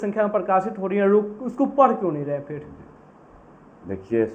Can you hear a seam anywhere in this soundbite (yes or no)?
no